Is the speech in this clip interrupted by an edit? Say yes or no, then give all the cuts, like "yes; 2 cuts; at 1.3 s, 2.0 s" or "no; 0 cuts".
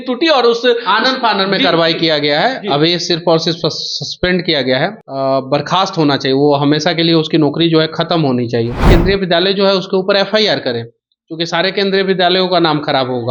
yes; 2 cuts; at 5.0 s, 8.8 s